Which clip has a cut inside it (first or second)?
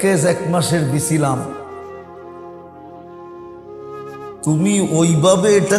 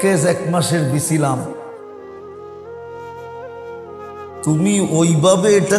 second